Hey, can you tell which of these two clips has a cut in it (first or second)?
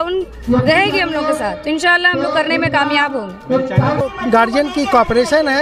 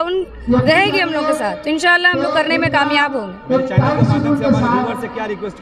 first